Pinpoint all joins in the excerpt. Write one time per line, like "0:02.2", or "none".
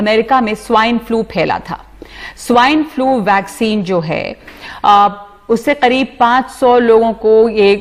none